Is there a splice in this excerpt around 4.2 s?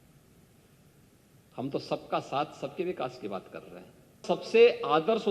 yes; 1 cut; at 4.2 s

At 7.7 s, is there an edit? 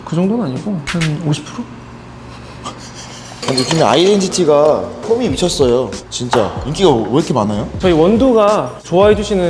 yes; 2 cuts; at 3.4 s, 7.7 s

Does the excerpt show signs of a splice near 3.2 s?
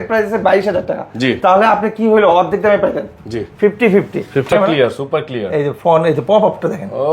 no; 1 cut; at 4.5 s

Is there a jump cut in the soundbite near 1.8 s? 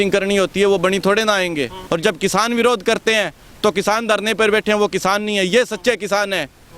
yes; 1 cut; at 1.8 s

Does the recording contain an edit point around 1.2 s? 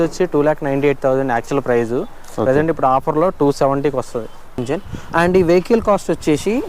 no; 1 cut; at 4.6 s

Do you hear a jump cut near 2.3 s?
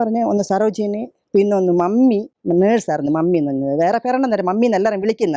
yes; 1 cut; at 2.3 s

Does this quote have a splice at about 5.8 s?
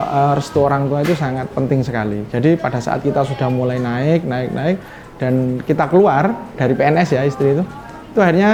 no; 0 cuts

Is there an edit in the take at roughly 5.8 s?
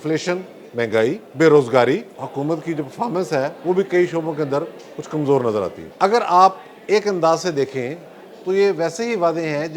yes; 3 cuts; at 1.2 s, 2.2 s, 5.8 s

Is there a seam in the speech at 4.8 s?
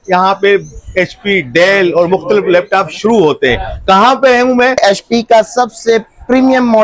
yes; 1 cut; at 4.8 s

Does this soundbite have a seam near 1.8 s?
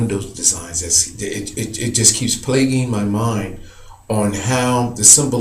yes; 1 cut; at 1.8 s

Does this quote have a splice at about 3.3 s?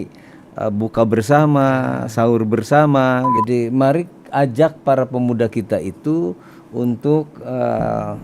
yes; 1 cut; at 3.3 s

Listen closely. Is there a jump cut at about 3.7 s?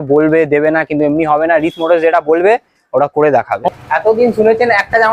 yes; 1 cut; at 3.7 s

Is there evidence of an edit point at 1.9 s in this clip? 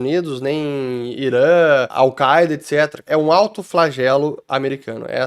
yes; 2 cuts; at 1.9 s, 3.1 s

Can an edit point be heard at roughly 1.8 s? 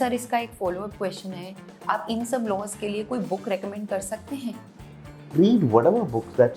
no; 1 cut; at 5.2 s

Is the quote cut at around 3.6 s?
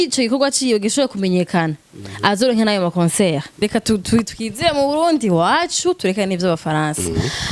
yes; 1 cut; at 3.6 s

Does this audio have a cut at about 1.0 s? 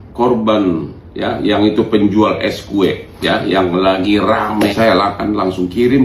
no; 1 cut; at 4.7 s

